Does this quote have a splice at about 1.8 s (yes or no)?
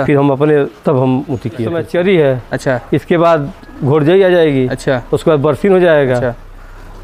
yes